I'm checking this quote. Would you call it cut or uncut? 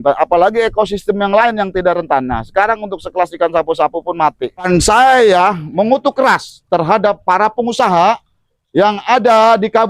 cut